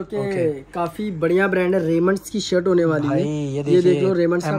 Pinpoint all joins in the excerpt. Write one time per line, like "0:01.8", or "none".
none